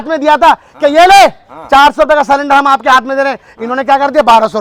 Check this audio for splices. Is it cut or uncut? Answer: uncut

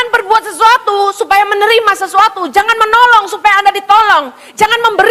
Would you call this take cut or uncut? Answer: uncut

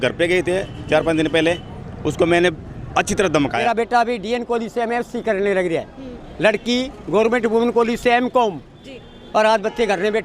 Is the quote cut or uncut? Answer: cut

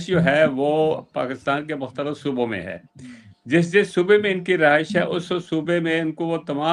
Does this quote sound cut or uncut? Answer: uncut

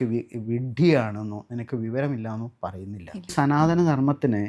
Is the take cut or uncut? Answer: cut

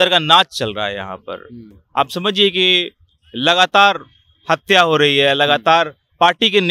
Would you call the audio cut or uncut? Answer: uncut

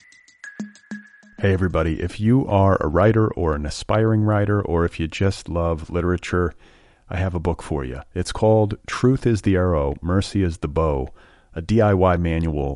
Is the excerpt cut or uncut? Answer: cut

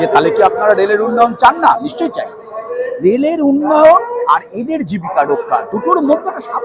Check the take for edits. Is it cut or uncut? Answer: uncut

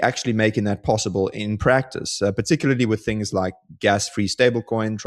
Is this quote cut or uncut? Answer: uncut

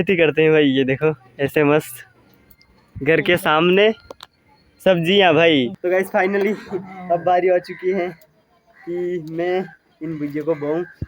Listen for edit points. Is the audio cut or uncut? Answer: cut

